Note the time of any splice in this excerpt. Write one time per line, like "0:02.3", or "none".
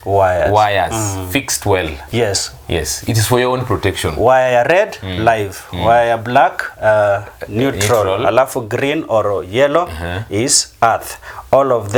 none